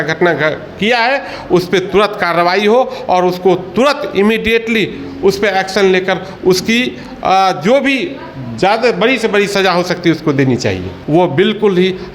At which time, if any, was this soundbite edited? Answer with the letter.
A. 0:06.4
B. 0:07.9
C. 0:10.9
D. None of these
C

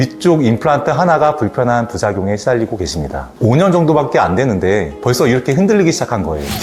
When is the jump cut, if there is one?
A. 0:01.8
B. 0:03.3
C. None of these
B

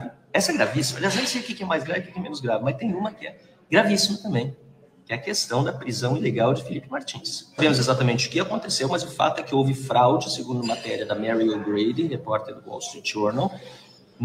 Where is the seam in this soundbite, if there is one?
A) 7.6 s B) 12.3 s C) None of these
A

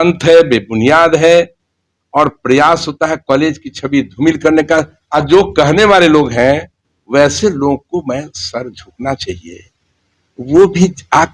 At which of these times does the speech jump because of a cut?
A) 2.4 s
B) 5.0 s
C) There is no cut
B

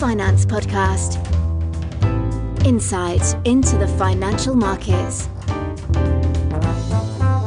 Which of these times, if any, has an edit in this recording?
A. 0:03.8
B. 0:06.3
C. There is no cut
C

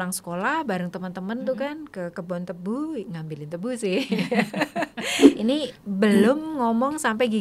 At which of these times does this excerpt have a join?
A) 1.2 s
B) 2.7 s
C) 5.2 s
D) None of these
C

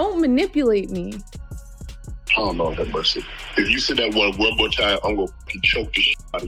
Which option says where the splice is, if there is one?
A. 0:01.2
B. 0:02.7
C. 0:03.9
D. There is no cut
D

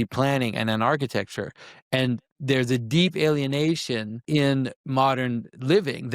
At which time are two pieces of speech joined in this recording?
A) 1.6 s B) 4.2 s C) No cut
B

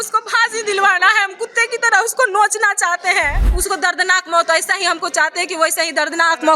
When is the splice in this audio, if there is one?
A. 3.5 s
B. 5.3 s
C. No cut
A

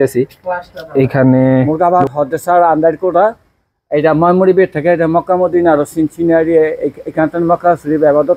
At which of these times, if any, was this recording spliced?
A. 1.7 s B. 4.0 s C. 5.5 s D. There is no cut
A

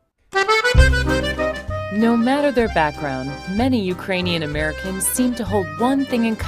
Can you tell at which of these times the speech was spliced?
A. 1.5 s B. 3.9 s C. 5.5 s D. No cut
B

